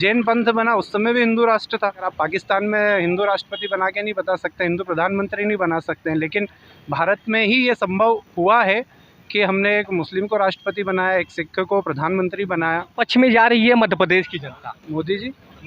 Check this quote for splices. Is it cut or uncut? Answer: cut